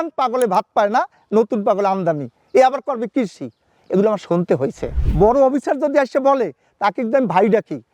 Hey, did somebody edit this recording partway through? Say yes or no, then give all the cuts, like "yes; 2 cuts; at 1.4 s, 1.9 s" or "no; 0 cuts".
yes; 1 cut; at 4.9 s